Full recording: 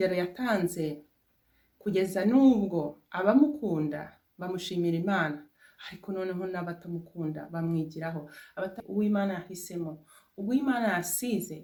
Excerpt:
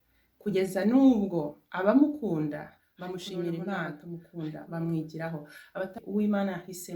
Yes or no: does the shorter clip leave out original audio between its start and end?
yes